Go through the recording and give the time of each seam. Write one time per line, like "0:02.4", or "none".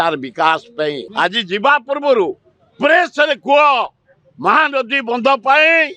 0:01.0

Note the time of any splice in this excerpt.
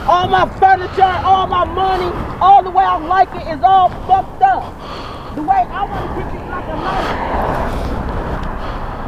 none

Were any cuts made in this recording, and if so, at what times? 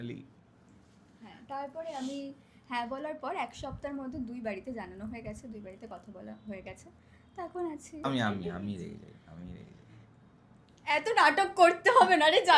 0:08.0

